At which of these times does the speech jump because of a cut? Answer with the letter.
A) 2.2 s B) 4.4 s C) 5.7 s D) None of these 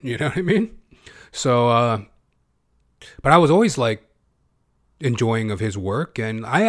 D